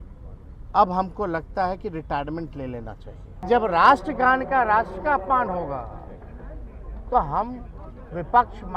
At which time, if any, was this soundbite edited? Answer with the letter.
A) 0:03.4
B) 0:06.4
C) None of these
A